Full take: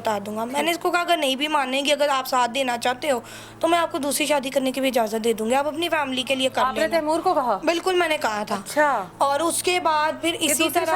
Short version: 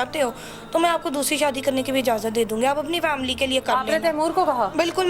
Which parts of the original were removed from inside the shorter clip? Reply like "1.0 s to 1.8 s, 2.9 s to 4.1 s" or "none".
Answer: none